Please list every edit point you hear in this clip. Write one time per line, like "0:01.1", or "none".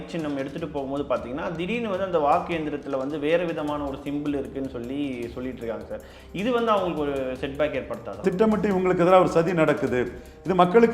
0:08.2

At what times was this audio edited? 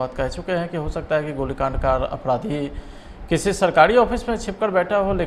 none

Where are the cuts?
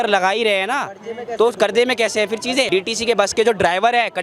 0:02.7

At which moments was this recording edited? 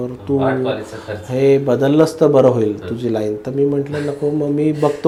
none

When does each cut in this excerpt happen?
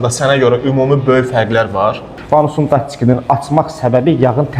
0:02.4

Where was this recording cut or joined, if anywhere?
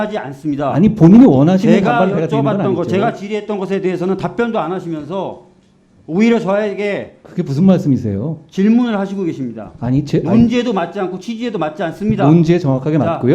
none

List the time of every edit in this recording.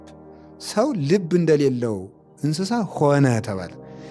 none

